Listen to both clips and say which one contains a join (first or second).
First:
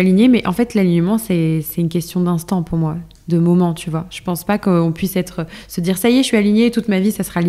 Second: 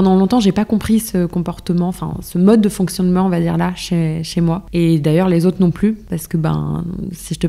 second